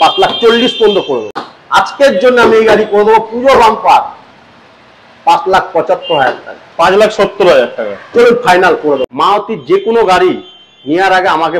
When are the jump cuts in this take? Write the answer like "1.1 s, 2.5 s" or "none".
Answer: 1.4 s, 9.1 s

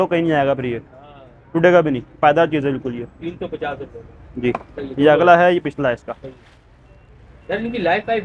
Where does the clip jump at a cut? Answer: none

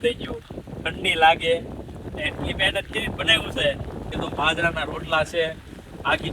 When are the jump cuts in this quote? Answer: 4.1 s

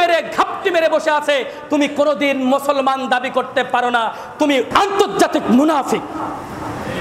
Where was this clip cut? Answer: 4.7 s

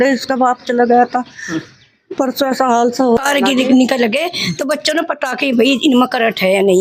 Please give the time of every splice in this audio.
3.2 s

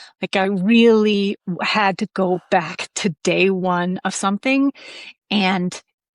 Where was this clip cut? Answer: none

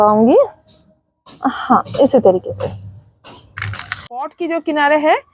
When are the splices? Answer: 4.3 s

